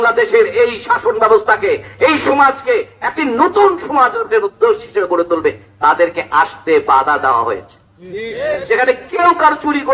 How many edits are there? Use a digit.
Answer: 1